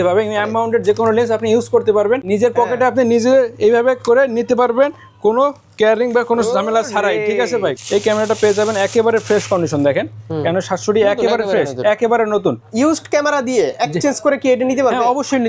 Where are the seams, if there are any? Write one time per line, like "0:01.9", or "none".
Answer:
0:02.3
0:07.8
0:12.6